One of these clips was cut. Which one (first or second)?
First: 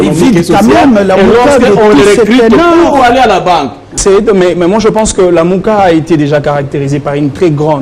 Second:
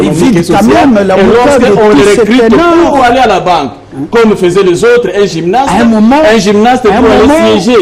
first